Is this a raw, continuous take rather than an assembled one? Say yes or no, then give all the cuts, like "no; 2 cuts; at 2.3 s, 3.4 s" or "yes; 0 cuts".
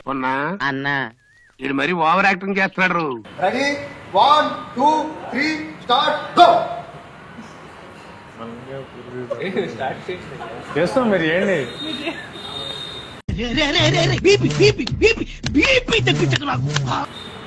yes; 0 cuts